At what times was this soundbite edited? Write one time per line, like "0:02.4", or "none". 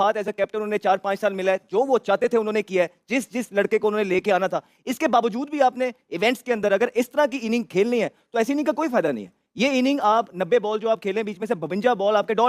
none